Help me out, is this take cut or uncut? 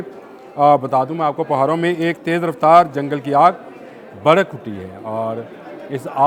uncut